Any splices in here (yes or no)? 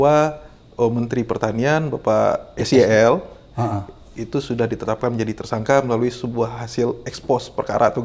no